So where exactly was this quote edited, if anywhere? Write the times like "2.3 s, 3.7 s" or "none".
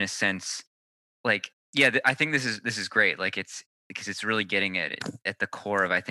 none